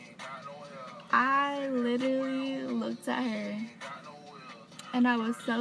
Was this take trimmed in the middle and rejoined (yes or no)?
no